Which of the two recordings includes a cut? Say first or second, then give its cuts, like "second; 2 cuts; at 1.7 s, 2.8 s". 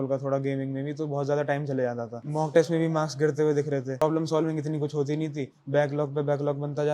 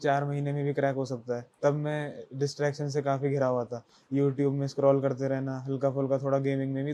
first; 2 cuts; at 2.2 s, 4.0 s